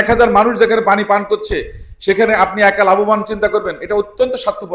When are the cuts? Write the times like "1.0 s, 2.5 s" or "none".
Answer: none